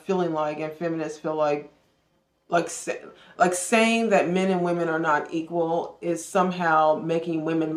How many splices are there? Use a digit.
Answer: 0